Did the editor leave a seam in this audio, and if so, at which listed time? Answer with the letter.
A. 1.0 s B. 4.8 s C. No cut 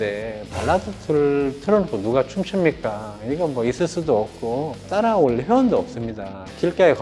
B